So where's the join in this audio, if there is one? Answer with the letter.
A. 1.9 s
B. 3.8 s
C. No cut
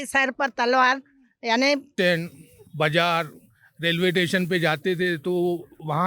A